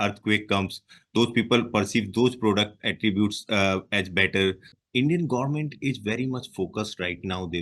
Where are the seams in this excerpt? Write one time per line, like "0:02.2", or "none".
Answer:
0:04.7